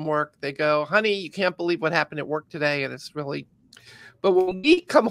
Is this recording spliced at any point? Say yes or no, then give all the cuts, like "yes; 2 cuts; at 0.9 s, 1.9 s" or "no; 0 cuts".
no; 0 cuts